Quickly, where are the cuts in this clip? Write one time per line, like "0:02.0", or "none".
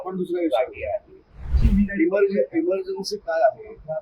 0:01.5